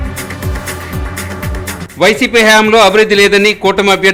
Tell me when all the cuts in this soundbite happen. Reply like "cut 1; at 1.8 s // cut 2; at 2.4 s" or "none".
cut 1; at 1.6 s